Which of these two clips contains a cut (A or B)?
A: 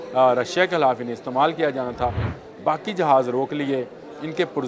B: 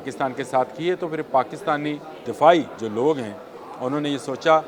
B